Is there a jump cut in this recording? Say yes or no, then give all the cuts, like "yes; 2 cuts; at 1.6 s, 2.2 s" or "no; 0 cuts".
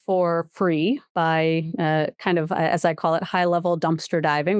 no; 0 cuts